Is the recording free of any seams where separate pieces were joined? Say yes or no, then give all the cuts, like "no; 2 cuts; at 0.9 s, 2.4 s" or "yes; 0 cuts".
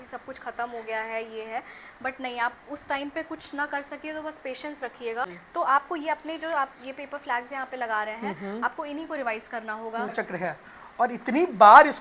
no; 2 cuts; at 5.4 s, 10.1 s